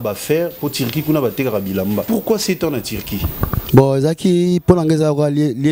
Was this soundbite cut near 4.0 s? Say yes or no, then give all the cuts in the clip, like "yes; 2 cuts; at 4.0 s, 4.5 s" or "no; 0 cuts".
no; 1 cut; at 2.0 s